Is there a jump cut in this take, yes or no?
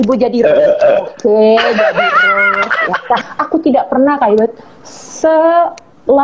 yes